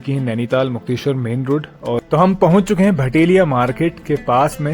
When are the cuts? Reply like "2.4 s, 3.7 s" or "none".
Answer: 2.0 s